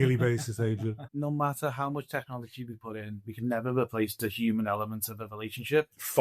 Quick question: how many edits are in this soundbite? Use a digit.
1